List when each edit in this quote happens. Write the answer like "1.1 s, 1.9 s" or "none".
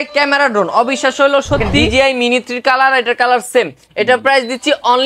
1.8 s